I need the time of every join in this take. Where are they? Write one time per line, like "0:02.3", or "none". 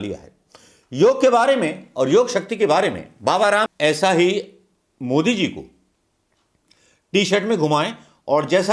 0:03.7

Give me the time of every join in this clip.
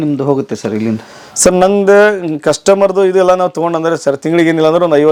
none

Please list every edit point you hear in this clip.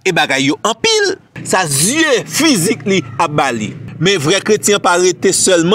0:01.3

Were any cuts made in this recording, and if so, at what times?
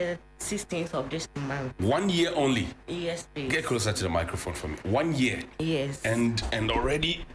0:04.0

